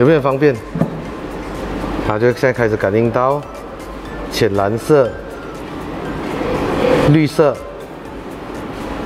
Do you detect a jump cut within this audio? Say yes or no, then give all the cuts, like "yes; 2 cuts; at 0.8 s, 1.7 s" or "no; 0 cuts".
no; 0 cuts